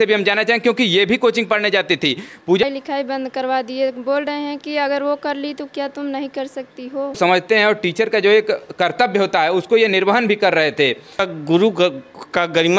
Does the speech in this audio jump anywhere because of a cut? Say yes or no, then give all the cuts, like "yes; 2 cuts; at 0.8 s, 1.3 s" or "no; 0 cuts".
yes; 3 cuts; at 2.6 s, 7.2 s, 11.2 s